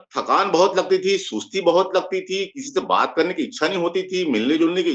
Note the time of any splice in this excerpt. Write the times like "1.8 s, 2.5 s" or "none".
none